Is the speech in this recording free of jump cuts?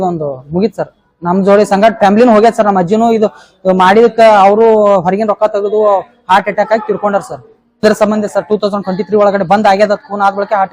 no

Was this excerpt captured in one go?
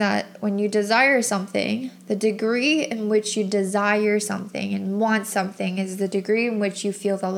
yes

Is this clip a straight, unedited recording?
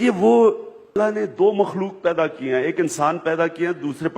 no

